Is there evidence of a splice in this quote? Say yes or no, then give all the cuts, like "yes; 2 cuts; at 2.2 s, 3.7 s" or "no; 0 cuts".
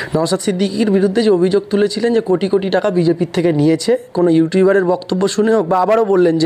no; 0 cuts